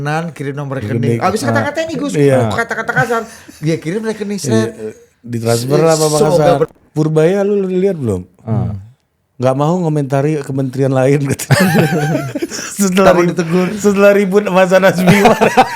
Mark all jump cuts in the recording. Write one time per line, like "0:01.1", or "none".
0:06.8